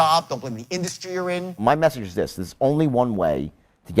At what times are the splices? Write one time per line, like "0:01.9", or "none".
0:01.6